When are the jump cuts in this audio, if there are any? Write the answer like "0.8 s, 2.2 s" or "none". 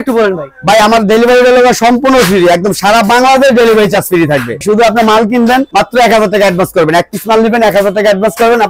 4.6 s